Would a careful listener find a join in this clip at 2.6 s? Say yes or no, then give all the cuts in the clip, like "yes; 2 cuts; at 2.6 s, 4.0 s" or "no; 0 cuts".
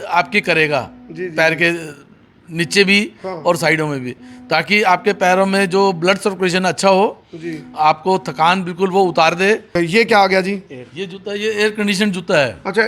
no; 1 cut; at 9.7 s